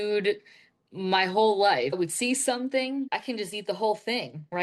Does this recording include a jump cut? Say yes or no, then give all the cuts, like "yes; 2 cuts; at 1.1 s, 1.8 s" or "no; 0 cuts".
yes; 2 cuts; at 1.9 s, 3.1 s